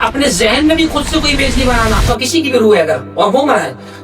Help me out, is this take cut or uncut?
cut